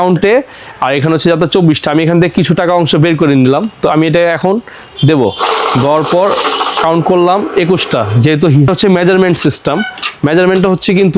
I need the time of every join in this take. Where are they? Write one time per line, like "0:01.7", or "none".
0:08.7